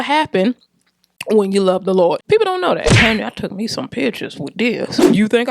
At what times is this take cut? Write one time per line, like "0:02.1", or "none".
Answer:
0:03.0

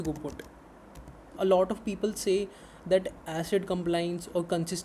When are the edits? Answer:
0:01.2

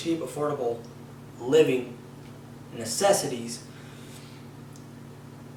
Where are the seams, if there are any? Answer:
none

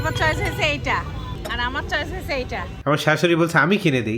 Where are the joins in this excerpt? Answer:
0:01.3
0:02.7

